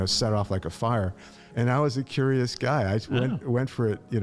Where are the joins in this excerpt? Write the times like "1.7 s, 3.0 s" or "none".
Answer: 1.5 s